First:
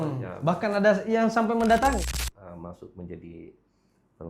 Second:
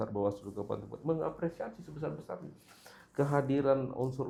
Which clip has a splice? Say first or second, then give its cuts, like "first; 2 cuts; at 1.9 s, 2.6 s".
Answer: first; 1 cut; at 2.2 s